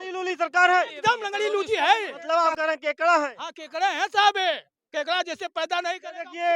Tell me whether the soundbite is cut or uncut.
cut